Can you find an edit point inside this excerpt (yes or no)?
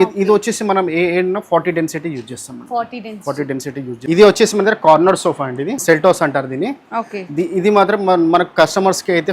yes